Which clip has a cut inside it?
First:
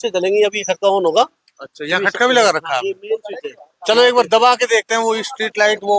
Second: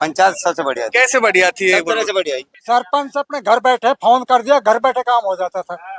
second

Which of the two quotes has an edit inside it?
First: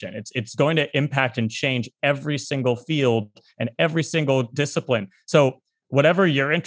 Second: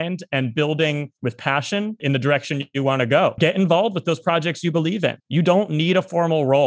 second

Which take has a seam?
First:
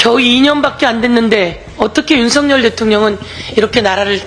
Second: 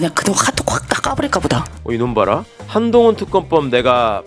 second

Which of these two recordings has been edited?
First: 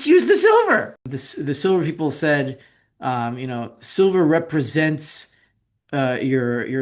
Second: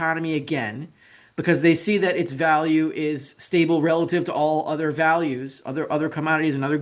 first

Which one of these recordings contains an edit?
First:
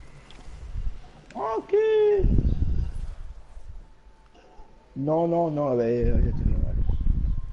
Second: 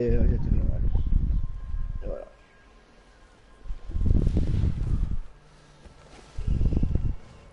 first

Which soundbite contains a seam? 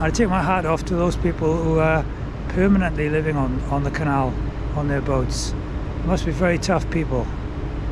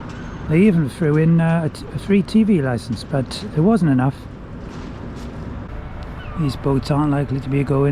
second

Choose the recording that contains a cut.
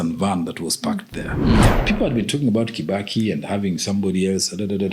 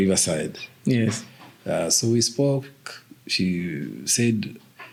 first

